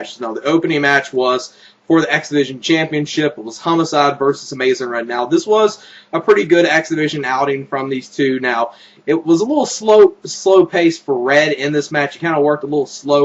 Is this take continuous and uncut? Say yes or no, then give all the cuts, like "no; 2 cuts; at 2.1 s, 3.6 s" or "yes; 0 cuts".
yes; 0 cuts